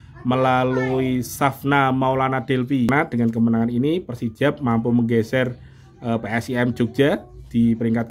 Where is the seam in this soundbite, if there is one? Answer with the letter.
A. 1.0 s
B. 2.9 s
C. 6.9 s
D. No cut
B